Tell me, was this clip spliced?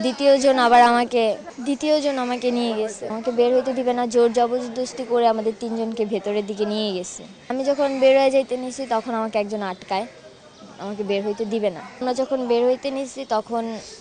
yes; 3 cuts; at 3.1 s, 7.5 s, 12.0 s

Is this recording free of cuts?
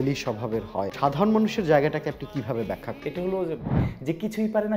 no; 2 cuts; at 0.9 s, 3.8 s

